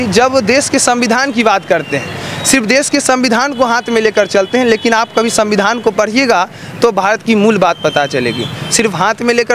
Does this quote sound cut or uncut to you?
uncut